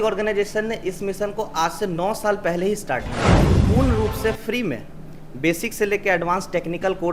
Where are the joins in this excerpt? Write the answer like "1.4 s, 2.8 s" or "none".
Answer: 3.6 s